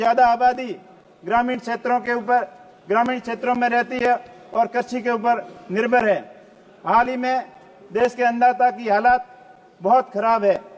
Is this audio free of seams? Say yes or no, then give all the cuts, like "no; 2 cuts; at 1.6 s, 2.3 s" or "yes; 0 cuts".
yes; 0 cuts